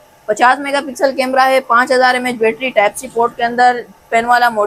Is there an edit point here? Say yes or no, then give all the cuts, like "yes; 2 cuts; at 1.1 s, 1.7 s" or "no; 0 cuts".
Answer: no; 0 cuts